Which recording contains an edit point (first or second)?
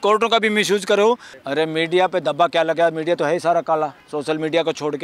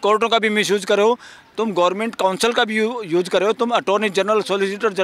first